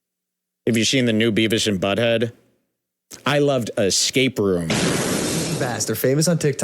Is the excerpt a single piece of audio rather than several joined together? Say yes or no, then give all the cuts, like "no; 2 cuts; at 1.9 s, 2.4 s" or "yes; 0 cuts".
no; 1 cut; at 5.5 s